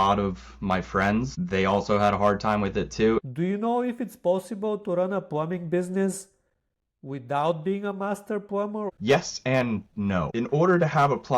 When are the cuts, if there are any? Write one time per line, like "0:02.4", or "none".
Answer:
0:03.3
0:08.9
0:10.3